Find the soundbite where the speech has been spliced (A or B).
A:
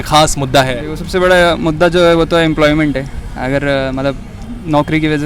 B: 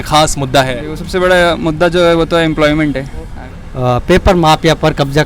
B